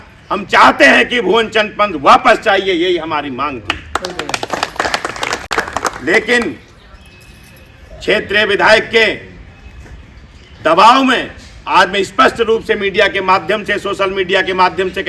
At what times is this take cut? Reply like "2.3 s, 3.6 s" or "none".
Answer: none

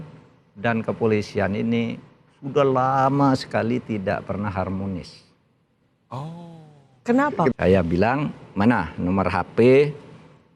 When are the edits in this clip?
7.5 s

